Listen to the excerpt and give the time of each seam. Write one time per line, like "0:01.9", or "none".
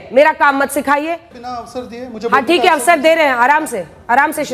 0:01.3